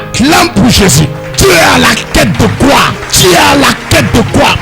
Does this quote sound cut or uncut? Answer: cut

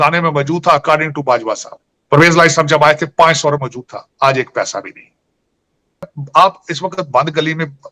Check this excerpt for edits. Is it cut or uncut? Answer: cut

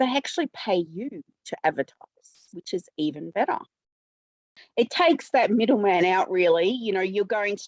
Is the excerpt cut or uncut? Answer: cut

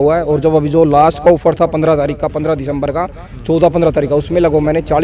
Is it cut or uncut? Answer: uncut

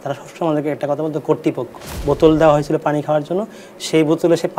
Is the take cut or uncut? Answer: cut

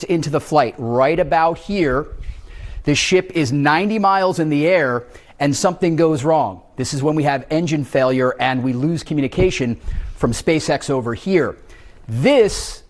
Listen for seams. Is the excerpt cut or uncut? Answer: uncut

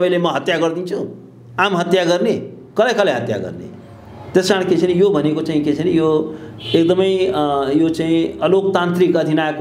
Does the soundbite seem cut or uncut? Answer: uncut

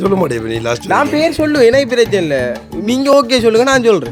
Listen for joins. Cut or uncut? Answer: uncut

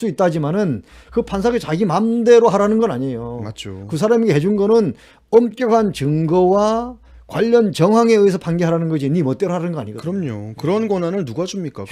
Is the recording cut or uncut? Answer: uncut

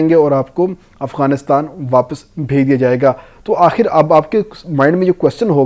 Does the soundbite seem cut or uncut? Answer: uncut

